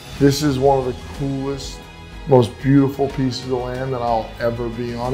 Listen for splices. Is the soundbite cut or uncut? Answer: uncut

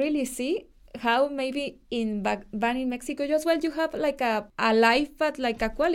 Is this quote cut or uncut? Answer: cut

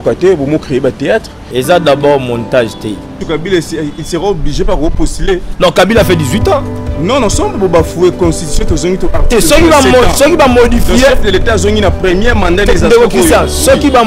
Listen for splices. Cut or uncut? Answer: cut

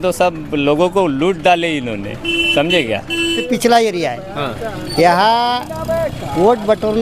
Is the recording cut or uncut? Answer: cut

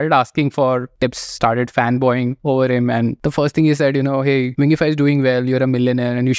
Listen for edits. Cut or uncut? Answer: cut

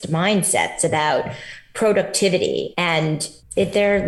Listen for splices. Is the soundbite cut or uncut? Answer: cut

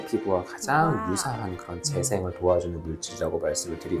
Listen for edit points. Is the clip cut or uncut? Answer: uncut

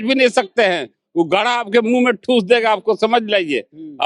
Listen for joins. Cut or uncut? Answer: uncut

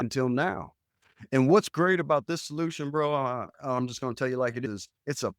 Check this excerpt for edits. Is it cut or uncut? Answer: uncut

